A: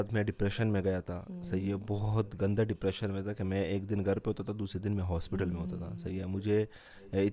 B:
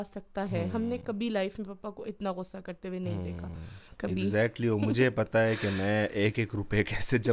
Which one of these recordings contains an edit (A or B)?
B